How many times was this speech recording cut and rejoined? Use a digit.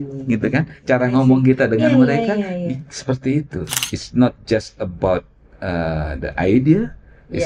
1